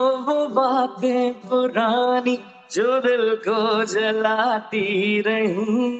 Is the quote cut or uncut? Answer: uncut